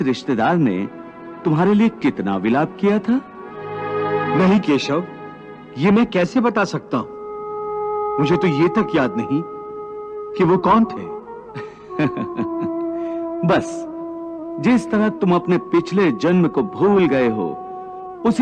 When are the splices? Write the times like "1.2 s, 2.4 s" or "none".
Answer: none